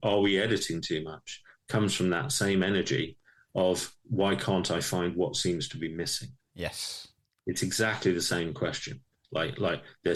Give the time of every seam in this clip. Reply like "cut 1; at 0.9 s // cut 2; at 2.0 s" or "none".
none